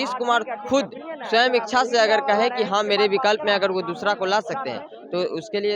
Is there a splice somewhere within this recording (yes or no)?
no